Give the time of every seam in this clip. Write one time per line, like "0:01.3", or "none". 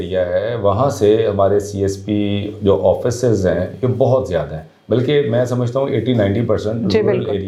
none